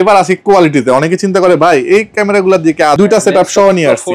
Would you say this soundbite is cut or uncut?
cut